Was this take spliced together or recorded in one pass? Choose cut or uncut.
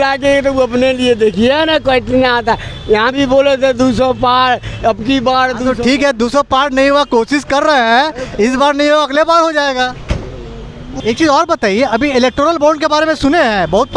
cut